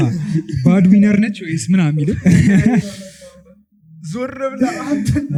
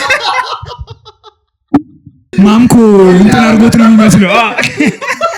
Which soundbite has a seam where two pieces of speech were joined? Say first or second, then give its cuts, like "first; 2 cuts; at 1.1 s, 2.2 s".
second; 1 cut; at 2.3 s